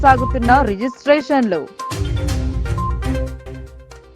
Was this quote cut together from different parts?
no; 0 cuts

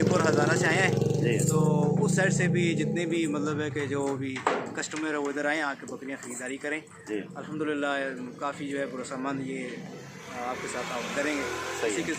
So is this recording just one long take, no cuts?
yes; 0 cuts

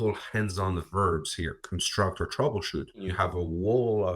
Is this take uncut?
no; 1 cut; at 3.1 s

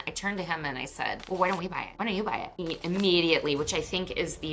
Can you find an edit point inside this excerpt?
yes; 3 cuts; at 1.2 s, 1.8 s, 2.5 s

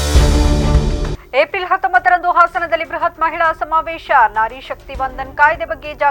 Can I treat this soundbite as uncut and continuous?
yes; 0 cuts

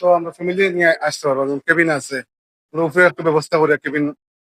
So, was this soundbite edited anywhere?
no; 0 cuts

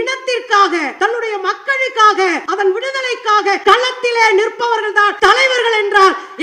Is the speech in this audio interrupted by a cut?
yes; 4 cuts; at 0.9 s, 2.4 s, 3.6 s, 5.1 s

